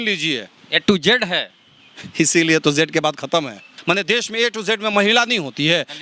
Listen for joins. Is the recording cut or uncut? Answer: cut